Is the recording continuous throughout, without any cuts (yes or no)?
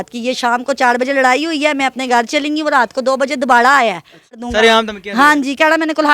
no